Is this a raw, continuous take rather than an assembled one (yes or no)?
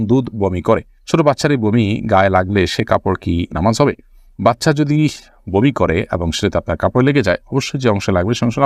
yes